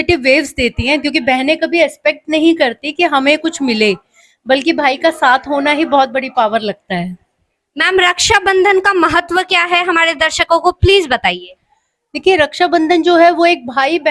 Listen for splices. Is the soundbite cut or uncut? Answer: uncut